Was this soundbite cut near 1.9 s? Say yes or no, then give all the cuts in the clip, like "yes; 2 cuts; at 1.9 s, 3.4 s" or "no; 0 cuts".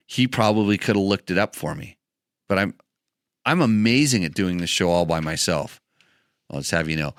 no; 0 cuts